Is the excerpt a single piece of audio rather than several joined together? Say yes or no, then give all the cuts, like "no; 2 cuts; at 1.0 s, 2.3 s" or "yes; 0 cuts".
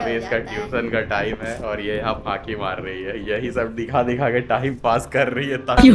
yes; 0 cuts